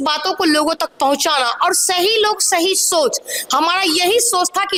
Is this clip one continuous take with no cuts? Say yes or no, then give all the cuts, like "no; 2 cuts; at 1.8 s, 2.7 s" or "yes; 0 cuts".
yes; 0 cuts